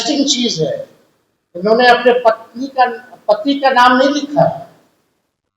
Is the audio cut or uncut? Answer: uncut